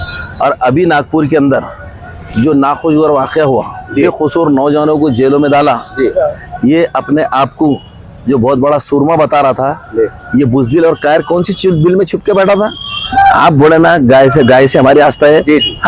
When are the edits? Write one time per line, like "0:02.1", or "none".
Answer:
0:04.0
0:12.9